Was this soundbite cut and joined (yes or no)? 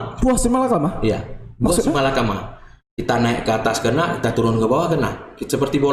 no